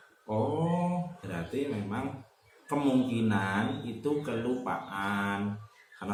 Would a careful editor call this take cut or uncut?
uncut